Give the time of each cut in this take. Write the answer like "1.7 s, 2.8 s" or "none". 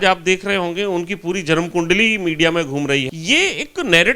3.1 s